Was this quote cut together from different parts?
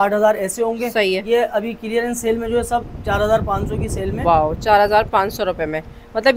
no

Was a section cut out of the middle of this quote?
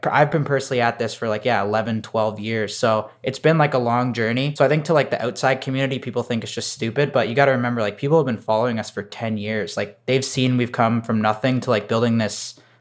yes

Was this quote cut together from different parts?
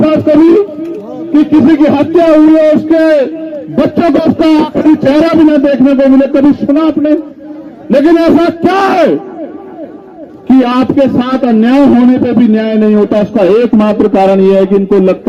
no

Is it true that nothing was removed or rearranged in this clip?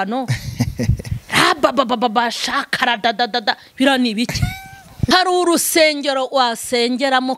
no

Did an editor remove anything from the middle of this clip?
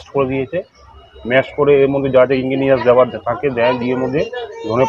no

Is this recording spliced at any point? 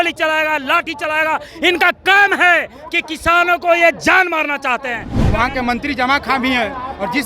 yes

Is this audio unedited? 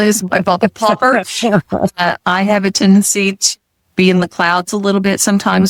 yes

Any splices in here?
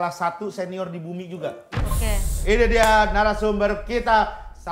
yes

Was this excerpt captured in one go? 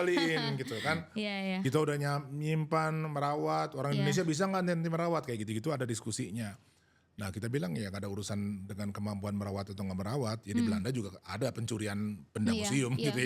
yes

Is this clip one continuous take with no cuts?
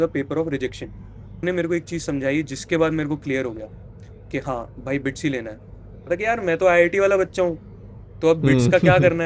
no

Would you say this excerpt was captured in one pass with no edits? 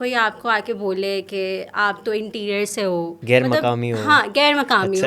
yes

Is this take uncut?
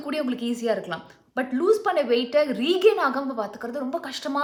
yes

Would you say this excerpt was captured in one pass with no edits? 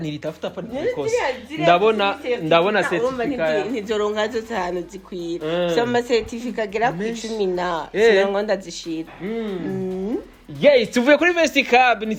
yes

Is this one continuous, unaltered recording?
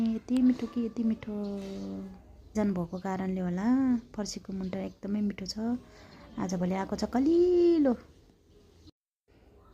no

